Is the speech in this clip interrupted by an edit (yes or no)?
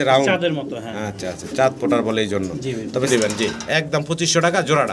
yes